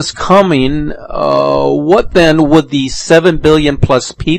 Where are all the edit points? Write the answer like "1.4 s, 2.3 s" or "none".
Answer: none